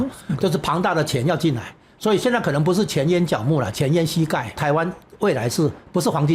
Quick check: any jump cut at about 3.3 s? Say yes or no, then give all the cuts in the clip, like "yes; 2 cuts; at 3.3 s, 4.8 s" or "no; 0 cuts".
no; 1 cut; at 4.6 s